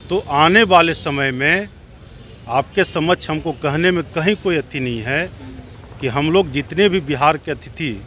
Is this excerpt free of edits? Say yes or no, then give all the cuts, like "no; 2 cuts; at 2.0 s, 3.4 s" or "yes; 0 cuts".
yes; 0 cuts